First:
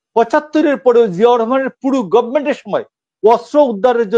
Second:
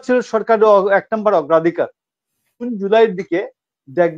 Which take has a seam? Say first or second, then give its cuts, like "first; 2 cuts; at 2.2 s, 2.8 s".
second; 1 cut; at 2.6 s